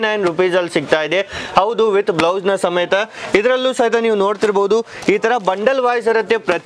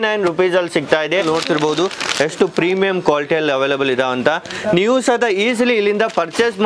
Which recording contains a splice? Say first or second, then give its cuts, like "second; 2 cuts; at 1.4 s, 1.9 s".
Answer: second; 1 cut; at 1.2 s